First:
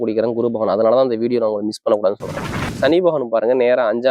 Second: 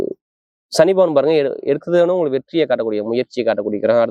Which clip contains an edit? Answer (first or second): first